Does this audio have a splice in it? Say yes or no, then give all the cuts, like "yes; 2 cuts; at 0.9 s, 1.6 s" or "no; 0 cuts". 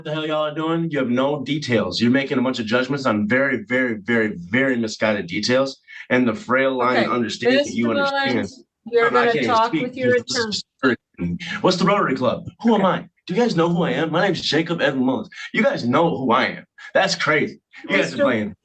no; 0 cuts